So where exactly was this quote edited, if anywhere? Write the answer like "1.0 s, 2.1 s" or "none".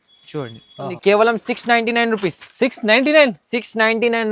0.9 s